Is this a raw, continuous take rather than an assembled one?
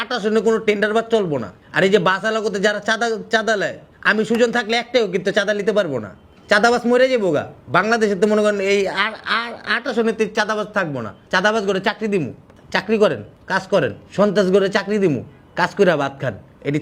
yes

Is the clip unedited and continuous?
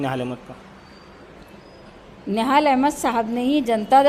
yes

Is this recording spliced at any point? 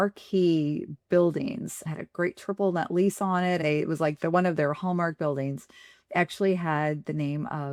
no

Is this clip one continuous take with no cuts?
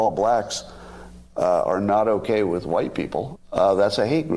yes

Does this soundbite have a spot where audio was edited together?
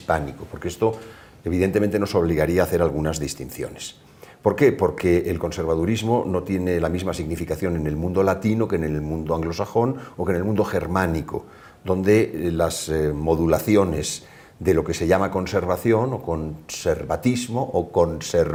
no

